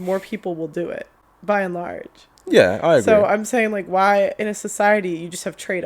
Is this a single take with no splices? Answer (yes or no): yes